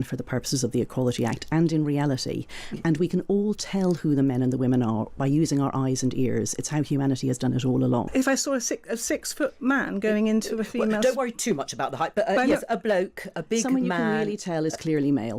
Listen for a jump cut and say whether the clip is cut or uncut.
cut